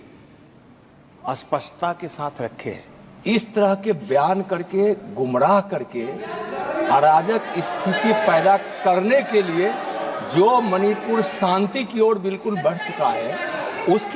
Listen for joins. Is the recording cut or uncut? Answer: uncut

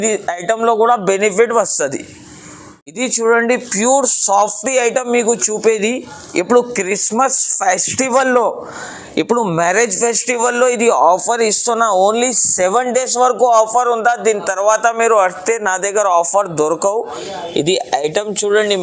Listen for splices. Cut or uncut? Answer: uncut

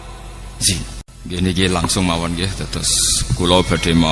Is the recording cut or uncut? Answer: cut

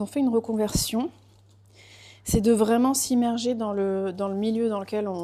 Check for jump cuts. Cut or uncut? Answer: uncut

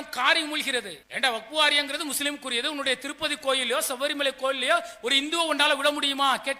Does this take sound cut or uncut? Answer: cut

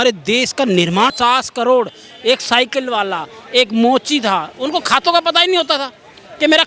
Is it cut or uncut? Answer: cut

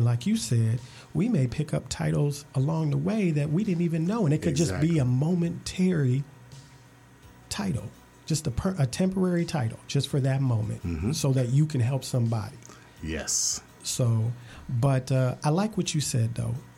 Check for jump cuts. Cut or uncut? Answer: uncut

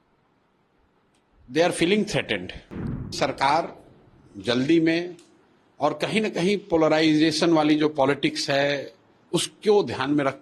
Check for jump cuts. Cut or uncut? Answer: cut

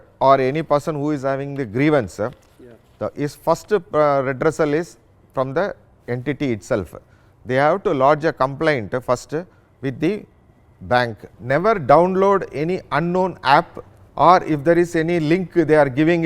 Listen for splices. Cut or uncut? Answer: cut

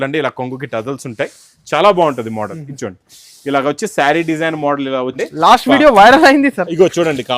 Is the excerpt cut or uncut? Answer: cut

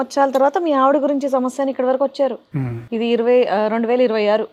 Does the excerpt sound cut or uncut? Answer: uncut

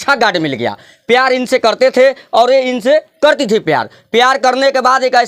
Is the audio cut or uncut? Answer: uncut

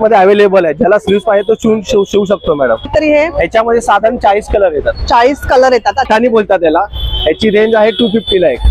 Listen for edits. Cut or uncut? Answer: cut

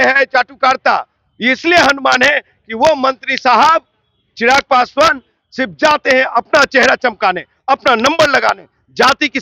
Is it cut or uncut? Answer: uncut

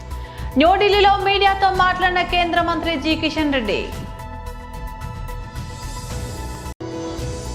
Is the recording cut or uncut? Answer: cut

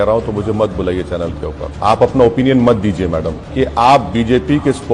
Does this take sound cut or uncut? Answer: cut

